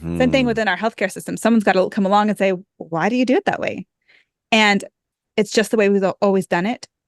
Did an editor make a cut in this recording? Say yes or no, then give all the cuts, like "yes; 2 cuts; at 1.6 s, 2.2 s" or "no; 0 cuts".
no; 0 cuts